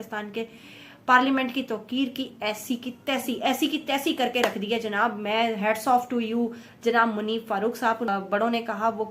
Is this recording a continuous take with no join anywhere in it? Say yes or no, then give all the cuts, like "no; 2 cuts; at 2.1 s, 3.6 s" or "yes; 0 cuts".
no; 1 cut; at 8.1 s